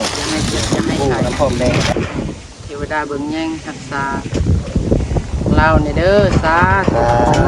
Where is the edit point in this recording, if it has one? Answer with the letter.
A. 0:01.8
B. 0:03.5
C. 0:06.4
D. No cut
A